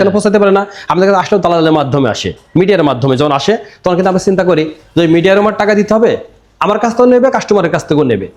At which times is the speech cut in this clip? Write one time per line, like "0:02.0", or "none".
none